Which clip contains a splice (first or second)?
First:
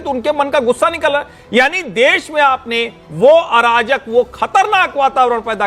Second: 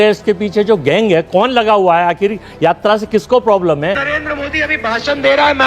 second